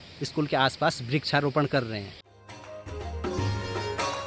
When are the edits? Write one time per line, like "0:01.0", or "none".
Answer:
none